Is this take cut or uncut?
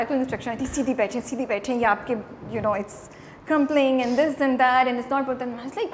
uncut